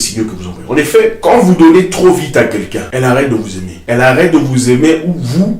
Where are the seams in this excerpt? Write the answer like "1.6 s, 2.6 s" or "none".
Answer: 1.2 s, 2.8 s, 3.7 s